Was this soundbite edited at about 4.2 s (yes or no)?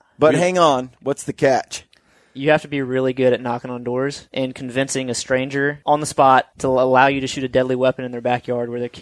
yes